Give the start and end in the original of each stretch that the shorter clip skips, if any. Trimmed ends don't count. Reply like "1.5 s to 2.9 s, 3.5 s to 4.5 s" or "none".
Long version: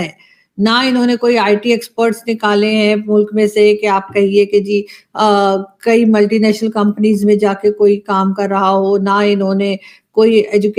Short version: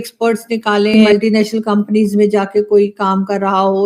2.7 s to 6.1 s